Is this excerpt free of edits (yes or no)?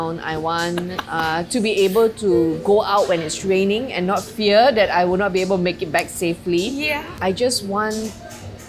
no